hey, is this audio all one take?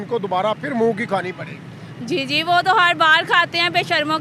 yes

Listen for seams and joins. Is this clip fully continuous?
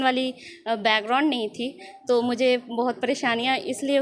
yes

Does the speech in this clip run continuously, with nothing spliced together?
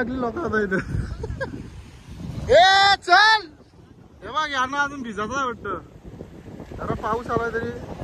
yes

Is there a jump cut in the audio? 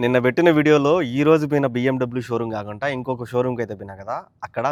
no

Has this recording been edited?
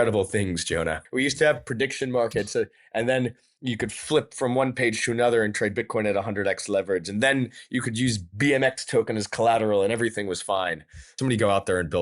yes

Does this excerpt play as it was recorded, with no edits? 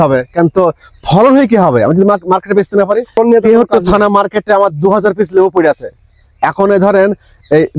no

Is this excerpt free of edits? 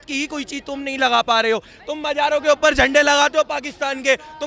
yes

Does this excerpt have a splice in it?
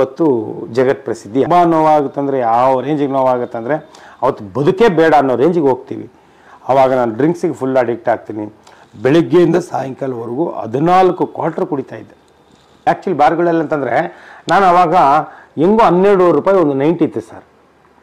yes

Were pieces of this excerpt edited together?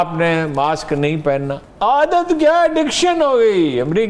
yes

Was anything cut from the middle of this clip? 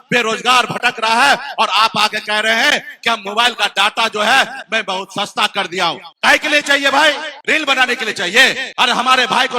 yes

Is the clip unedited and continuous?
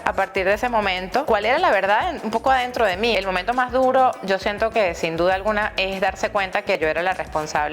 no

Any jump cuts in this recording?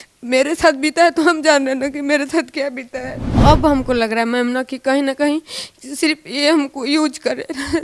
yes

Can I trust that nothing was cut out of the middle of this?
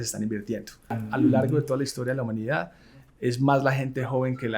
no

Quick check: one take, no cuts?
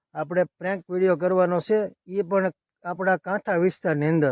yes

